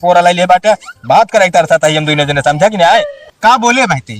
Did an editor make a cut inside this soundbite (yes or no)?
yes